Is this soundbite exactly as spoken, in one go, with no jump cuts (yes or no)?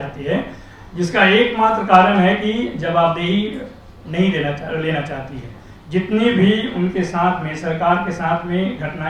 yes